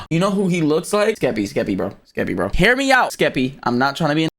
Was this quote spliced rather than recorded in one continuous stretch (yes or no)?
yes